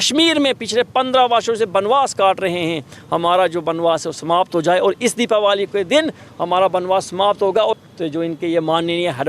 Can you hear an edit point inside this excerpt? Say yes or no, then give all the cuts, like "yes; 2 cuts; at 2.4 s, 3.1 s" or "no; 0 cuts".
yes; 1 cut; at 7.7 s